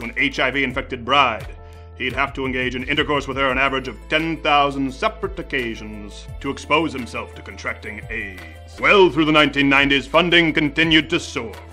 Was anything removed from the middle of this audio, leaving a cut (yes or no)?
yes